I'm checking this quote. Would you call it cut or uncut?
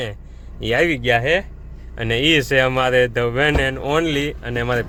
uncut